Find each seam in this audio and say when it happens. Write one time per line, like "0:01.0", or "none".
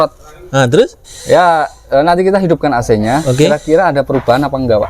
none